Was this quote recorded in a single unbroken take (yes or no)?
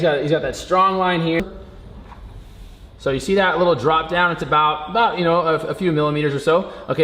no